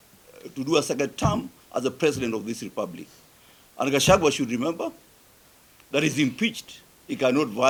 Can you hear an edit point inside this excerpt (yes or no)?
no